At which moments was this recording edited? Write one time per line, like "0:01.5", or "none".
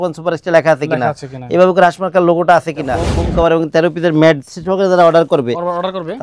0:03.2